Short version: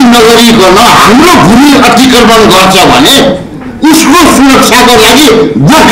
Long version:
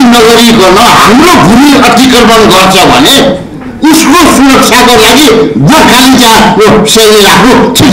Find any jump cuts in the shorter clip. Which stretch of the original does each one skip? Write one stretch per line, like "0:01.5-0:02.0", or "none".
none